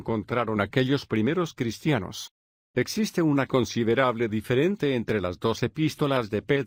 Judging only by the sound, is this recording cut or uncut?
uncut